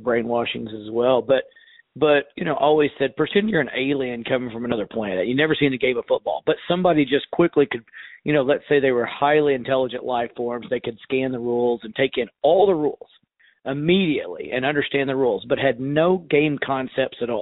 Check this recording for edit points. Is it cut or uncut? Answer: uncut